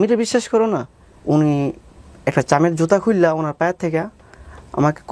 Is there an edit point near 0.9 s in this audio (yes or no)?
yes